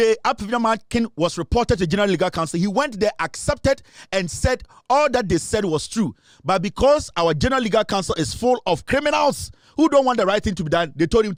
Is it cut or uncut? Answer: uncut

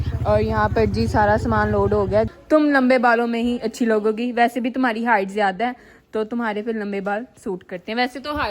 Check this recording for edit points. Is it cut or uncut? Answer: cut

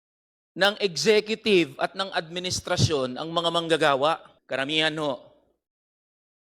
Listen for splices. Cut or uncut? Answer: cut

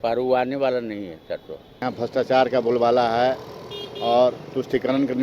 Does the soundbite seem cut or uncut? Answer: cut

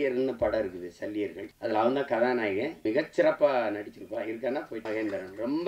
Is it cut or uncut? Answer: cut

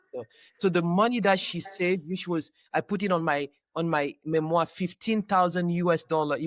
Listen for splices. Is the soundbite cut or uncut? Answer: uncut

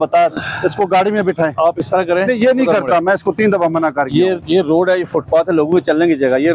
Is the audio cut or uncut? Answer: uncut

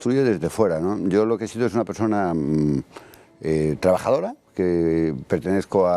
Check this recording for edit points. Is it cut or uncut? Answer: uncut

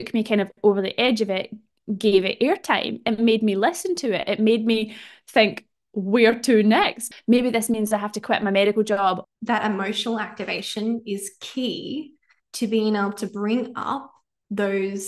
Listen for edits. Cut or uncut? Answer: cut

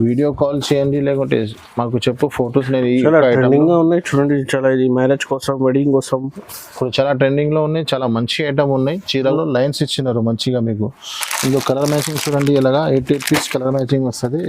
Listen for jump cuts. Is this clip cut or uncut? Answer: cut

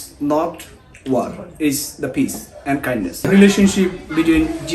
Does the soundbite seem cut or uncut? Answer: cut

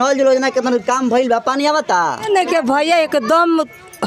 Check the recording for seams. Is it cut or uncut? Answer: cut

